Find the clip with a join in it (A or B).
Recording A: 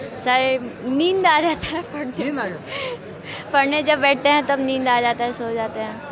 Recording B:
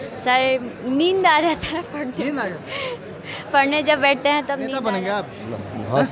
B